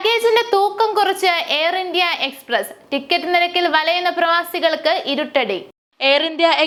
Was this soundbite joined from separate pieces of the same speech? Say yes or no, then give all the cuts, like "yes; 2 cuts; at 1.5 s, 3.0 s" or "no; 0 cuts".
no; 0 cuts